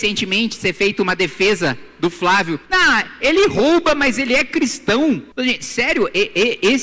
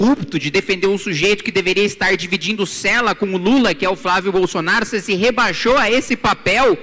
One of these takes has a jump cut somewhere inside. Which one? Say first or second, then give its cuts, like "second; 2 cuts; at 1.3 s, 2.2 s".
first; 2 cuts; at 2.6 s, 5.3 s